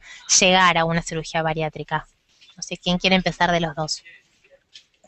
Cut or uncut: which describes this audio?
cut